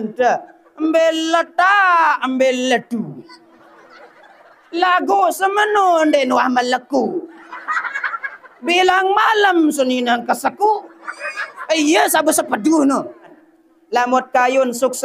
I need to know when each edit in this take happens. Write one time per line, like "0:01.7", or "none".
0:13.5